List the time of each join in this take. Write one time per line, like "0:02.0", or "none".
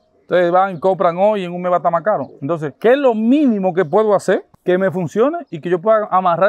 0:04.5